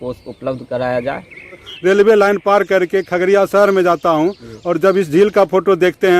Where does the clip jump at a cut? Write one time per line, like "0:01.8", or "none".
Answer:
0:01.7